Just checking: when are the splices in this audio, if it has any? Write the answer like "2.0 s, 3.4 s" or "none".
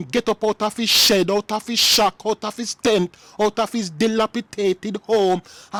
none